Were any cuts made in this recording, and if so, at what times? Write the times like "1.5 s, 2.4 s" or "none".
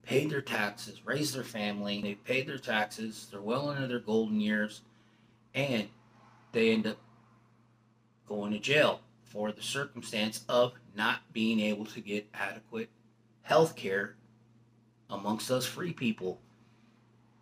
2.0 s